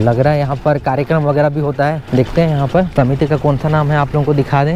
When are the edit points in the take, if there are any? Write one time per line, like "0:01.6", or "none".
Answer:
none